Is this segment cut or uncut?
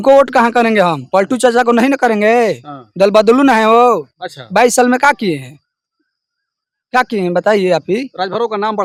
uncut